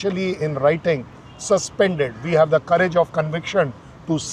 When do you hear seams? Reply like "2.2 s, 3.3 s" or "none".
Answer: none